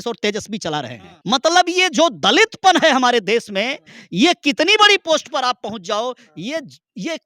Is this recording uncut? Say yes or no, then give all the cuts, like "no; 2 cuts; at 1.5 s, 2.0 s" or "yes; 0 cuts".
no; 1 cut; at 1.1 s